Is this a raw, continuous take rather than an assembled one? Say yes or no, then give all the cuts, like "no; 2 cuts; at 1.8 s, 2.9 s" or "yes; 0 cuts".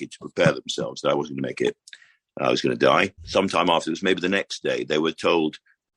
no; 1 cut; at 3.2 s